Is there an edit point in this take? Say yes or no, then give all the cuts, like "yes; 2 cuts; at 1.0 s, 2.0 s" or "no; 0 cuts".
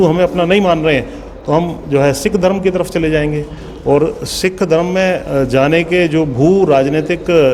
no; 0 cuts